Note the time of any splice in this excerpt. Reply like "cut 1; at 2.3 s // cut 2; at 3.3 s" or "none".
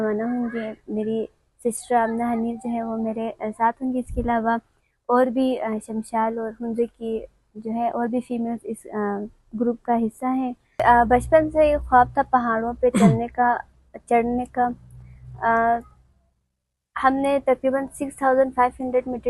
cut 1; at 10.8 s